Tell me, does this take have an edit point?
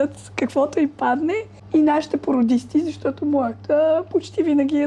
yes; 1 cut; at 1.5 s

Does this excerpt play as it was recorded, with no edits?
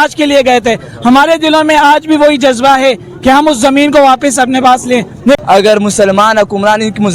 no; 1 cut; at 5.4 s

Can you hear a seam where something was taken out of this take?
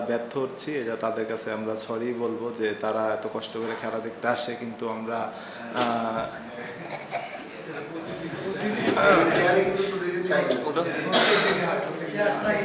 no; 0 cuts

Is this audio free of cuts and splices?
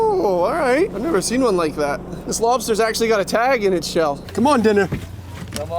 no; 2 cuts; at 0.9 s, 4.2 s

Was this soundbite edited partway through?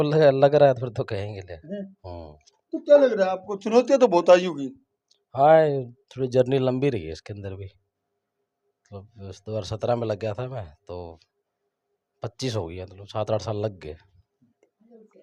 no; 0 cuts

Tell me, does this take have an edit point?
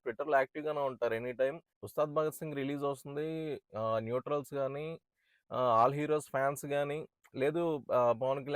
no; 0 cuts

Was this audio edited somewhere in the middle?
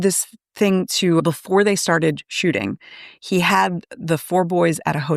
no; 0 cuts

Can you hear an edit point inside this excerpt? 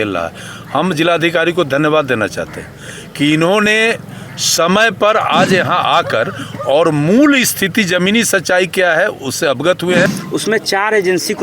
yes; 1 cut; at 10.2 s

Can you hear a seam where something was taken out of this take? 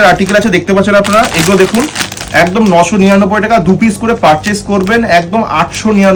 no; 0 cuts

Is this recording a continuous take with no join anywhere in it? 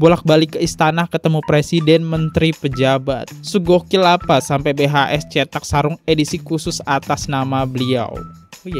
no; 1 cut; at 3.3 s

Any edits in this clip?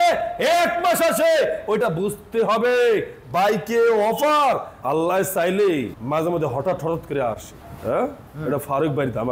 no; 0 cuts

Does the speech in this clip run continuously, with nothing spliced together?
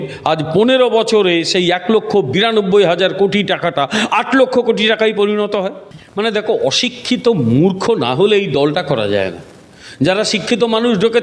no; 1 cut; at 6.0 s

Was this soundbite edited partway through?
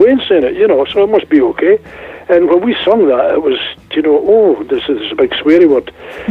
no; 0 cuts

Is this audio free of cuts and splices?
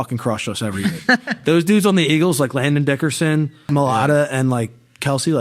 no; 1 cut; at 3.7 s

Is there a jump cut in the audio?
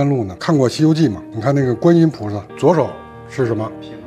yes; 1 cut; at 1.3 s

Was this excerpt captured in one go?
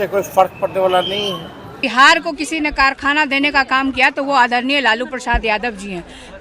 no; 1 cut; at 1.8 s

